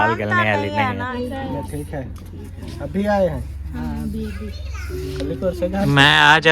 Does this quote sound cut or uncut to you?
cut